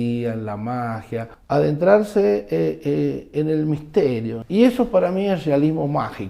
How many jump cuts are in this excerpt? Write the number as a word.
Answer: two